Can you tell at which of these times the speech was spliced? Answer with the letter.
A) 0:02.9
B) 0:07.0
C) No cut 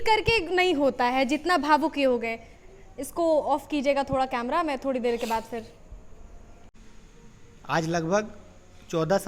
C